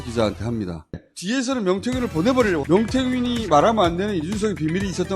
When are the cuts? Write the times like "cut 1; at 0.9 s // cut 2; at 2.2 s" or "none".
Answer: cut 1; at 1.0 s // cut 2; at 2.6 s